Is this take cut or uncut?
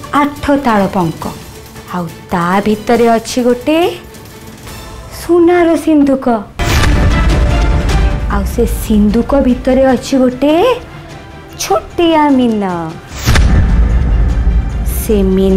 uncut